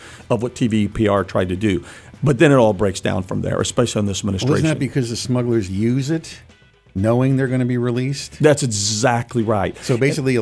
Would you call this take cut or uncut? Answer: uncut